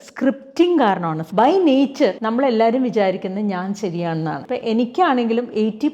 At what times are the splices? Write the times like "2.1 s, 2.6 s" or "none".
1.2 s, 2.2 s, 4.4 s